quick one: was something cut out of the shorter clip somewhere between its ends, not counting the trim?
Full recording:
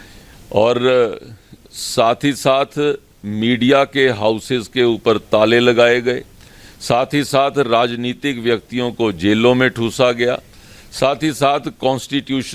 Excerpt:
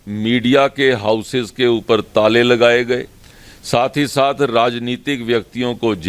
no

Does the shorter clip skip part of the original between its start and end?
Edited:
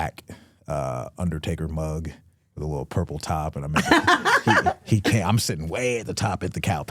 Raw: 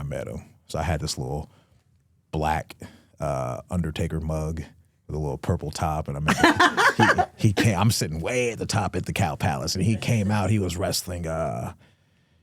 no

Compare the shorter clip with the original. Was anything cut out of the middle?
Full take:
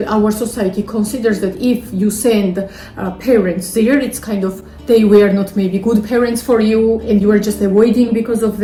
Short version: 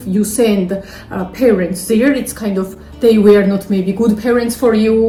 no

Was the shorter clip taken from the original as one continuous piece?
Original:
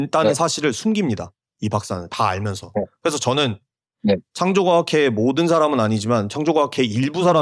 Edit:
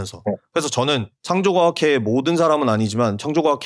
no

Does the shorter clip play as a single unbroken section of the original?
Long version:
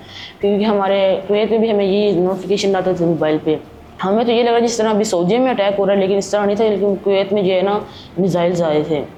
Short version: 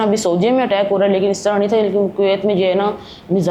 yes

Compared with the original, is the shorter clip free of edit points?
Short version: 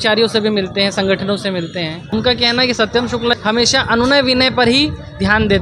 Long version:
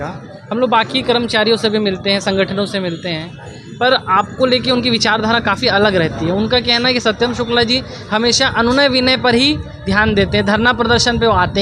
no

